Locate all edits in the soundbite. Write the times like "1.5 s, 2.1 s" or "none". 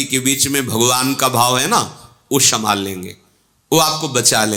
none